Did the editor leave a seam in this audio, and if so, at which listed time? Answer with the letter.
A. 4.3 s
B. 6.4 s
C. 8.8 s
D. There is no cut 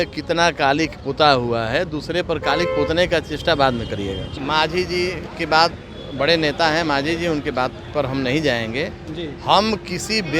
A